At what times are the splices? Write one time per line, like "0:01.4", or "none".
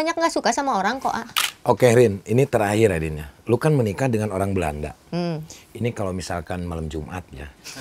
0:01.3